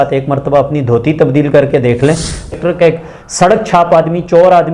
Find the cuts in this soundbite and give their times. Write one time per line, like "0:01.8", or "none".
0:02.5